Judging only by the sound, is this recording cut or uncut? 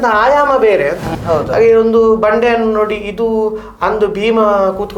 cut